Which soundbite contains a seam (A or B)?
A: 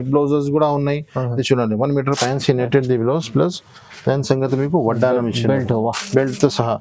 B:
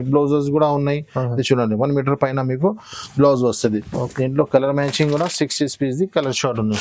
A